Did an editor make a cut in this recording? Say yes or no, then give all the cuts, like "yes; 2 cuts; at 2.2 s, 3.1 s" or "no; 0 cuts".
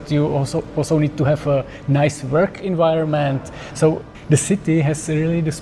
yes; 1 cut; at 4.1 s